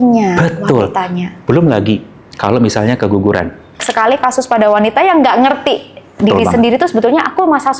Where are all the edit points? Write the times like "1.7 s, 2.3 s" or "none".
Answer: 3.9 s